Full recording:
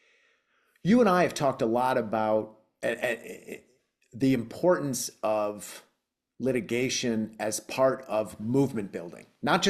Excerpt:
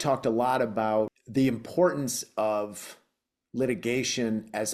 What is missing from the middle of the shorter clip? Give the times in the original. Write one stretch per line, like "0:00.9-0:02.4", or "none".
0:02.6-0:04.1